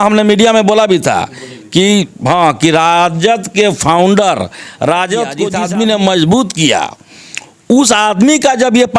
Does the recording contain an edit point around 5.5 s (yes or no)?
yes